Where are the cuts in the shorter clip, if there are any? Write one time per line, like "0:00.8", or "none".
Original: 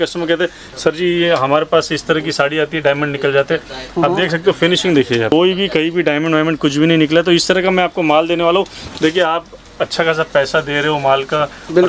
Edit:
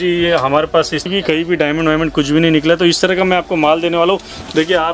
0:01.1